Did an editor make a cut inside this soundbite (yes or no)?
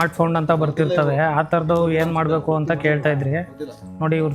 no